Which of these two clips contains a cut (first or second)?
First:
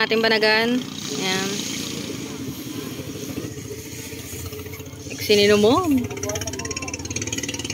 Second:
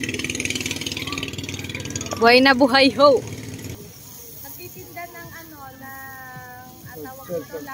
second